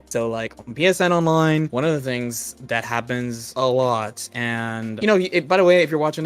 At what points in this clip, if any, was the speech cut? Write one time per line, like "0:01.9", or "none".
0:01.7
0:03.4
0:04.9